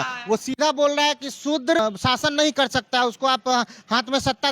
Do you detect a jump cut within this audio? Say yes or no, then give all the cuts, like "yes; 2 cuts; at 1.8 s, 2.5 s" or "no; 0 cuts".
yes; 1 cut; at 1.8 s